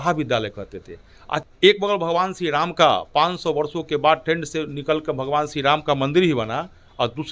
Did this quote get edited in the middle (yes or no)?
yes